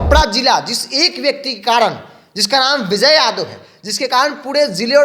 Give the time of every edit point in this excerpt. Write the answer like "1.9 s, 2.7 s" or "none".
none